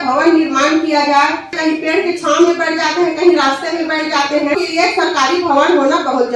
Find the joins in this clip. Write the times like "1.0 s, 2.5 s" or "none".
1.6 s, 4.5 s